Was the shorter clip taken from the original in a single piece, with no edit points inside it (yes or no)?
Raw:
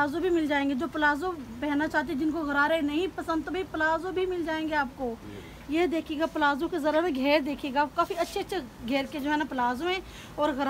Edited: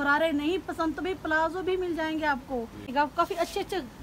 no